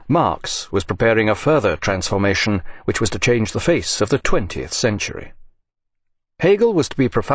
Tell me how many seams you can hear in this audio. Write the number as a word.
one